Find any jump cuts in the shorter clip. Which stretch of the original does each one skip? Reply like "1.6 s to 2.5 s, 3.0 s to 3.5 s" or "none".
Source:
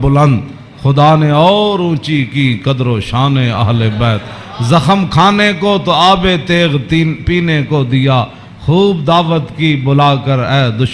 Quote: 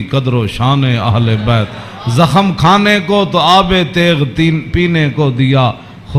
none

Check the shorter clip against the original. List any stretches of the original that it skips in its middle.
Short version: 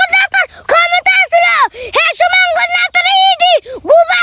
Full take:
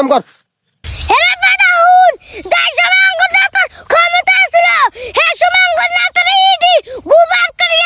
none

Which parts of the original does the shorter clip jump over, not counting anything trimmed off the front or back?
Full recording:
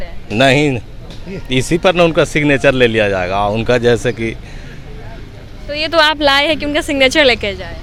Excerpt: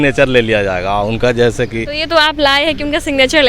4.4 s to 5.7 s

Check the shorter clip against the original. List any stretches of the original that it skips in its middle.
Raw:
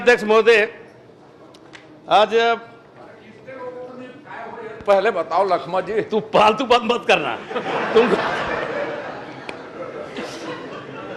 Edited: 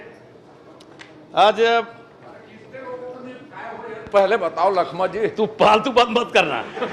none

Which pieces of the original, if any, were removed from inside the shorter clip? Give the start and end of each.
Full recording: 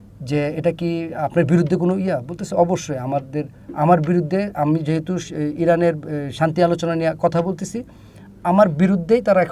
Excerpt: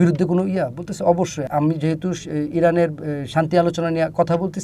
3.0 s to 4.5 s

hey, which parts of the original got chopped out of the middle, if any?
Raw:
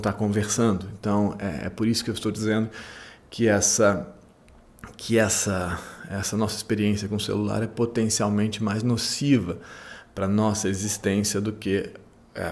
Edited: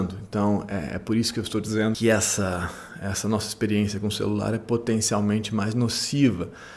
2.7 s to 5.1 s

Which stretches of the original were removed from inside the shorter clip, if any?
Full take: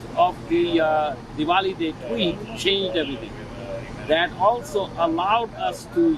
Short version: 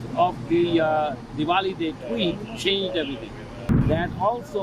3.7 s to 3.9 s

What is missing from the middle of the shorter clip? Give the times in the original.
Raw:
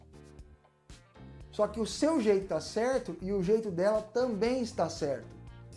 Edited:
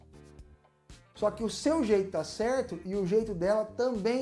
1.2 s to 1.6 s

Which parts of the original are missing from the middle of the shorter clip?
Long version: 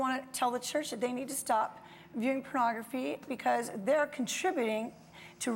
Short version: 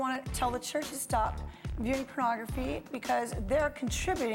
0.9 s to 1.3 s

